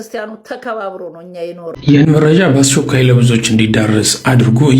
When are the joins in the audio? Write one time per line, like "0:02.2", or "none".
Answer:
0:01.7